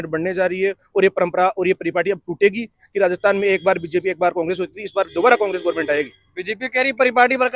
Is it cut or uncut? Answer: uncut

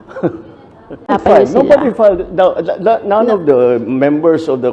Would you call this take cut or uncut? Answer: cut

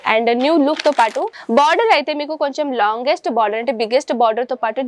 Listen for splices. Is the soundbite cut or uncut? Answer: cut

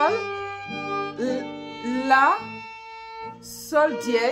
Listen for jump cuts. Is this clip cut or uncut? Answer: uncut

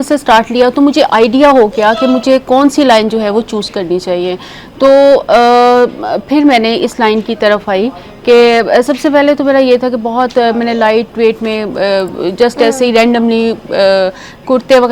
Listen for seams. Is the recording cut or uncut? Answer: uncut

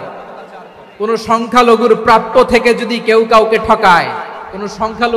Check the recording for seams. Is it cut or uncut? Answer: uncut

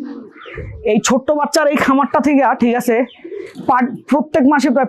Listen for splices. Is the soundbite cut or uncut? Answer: uncut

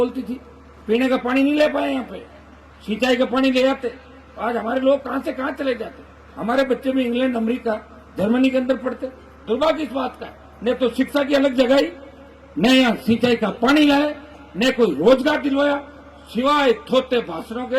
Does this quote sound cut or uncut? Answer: uncut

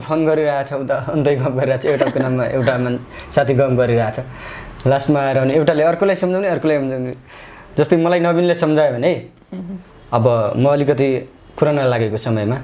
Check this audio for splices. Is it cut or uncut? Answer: uncut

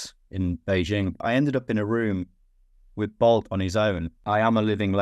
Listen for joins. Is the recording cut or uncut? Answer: cut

